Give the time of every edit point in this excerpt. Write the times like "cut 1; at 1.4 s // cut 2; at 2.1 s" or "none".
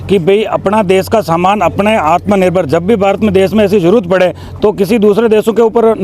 none